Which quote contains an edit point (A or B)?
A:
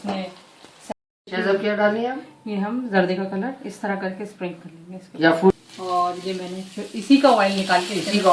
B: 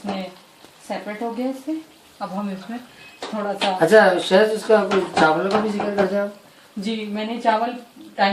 A